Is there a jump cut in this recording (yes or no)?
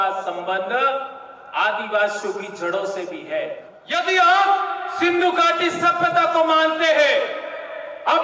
yes